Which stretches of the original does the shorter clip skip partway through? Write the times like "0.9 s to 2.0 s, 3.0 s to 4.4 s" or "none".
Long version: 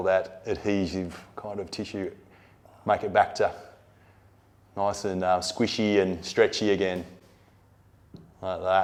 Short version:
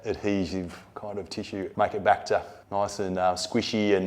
2.1 s to 2.8 s, 3.7 s to 4.6 s